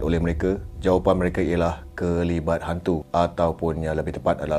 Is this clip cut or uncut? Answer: uncut